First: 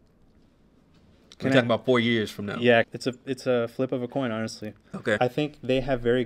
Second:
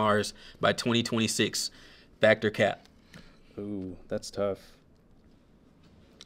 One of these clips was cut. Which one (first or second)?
first